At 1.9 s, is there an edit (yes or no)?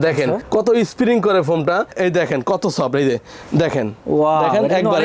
yes